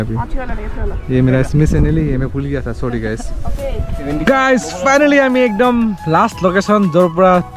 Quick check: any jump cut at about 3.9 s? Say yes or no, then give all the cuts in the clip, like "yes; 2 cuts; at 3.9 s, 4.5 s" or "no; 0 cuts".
yes; 1 cut; at 3.9 s